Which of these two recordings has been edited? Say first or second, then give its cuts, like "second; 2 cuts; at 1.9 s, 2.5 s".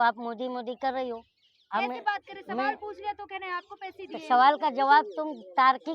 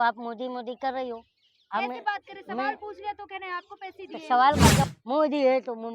second; 1 cut; at 4.9 s